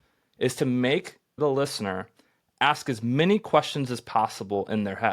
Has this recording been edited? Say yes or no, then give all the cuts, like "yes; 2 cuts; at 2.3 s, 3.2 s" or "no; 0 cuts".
yes; 1 cut; at 1.4 s